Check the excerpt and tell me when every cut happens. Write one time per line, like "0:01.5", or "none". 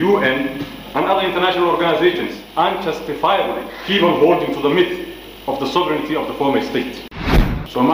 0:02.4
0:03.7
0:07.1